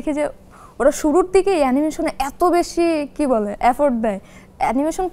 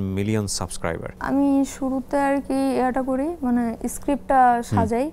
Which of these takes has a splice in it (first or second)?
second